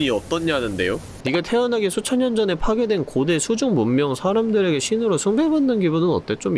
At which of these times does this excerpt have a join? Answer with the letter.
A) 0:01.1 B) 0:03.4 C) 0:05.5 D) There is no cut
A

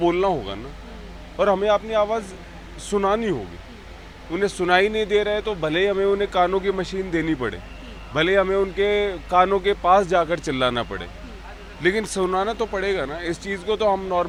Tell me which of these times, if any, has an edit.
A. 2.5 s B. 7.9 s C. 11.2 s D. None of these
D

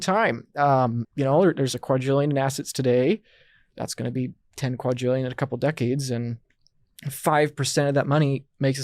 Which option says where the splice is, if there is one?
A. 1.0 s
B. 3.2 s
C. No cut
A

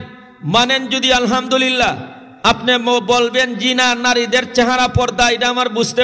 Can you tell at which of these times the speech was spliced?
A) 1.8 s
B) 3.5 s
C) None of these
C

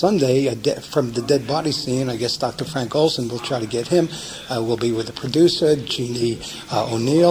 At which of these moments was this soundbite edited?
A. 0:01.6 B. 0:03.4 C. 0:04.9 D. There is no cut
B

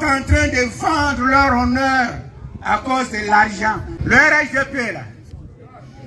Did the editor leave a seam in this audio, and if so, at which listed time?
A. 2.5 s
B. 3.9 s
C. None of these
B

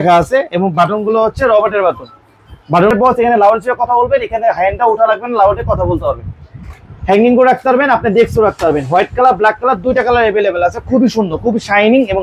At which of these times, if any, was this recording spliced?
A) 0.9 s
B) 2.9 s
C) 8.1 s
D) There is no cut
B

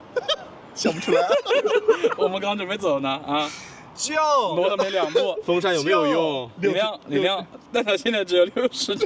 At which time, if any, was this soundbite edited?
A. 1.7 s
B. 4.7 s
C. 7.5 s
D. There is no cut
D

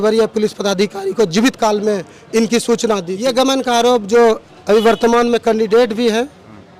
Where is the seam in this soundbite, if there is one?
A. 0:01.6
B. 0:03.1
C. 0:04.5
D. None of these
B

